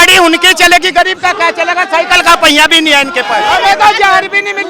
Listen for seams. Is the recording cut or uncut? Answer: cut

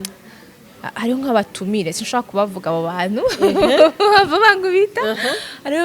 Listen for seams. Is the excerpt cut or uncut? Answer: uncut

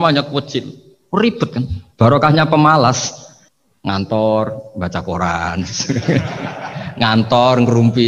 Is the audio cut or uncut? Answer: uncut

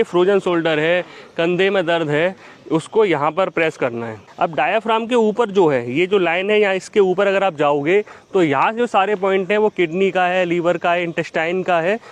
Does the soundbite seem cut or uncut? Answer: uncut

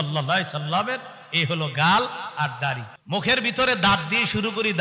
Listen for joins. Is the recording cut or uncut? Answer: cut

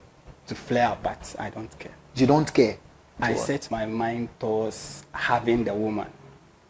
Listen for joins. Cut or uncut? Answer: cut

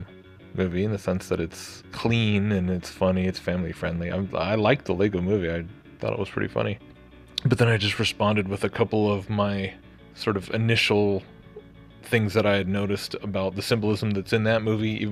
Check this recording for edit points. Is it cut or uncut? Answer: uncut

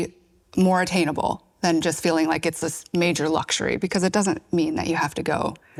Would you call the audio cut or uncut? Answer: uncut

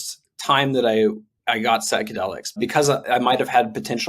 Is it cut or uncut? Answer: cut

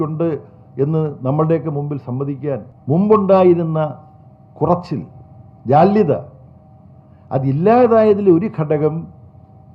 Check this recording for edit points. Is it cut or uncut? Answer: cut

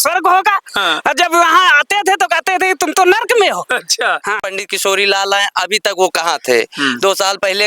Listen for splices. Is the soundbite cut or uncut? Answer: cut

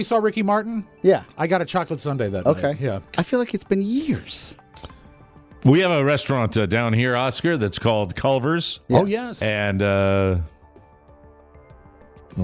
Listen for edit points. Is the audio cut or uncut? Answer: uncut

